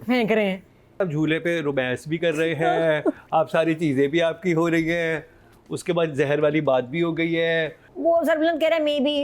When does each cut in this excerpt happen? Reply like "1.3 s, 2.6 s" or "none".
1.0 s, 7.9 s